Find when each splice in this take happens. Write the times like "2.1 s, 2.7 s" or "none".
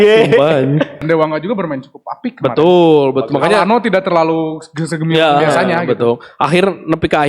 1.0 s